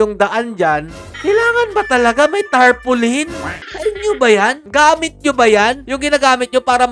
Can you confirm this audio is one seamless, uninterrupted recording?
yes; 0 cuts

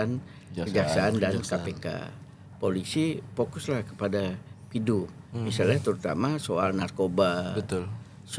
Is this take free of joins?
yes; 0 cuts

